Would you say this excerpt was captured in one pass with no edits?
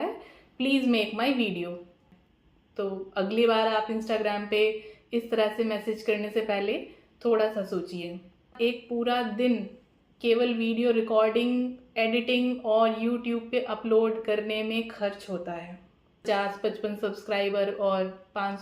no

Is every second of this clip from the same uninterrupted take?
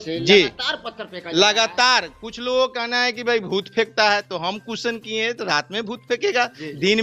yes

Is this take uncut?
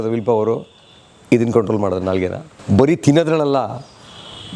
no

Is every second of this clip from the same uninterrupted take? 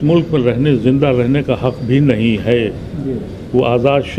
yes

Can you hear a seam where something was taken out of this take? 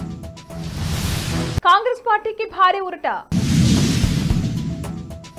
yes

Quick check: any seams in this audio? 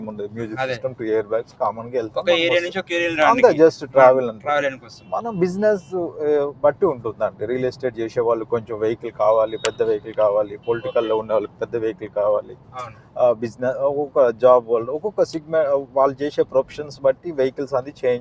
no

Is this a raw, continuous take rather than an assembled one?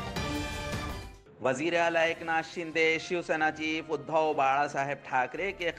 no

